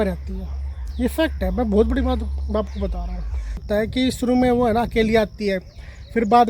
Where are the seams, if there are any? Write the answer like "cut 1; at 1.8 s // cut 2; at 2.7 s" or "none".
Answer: cut 1; at 3.6 s